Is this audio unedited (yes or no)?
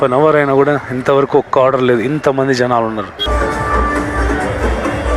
no